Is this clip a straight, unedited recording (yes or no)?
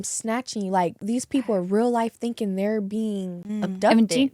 no